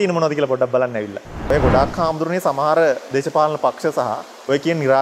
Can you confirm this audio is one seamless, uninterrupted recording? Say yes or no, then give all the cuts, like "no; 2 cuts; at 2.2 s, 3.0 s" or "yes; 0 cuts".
no; 1 cut; at 1.4 s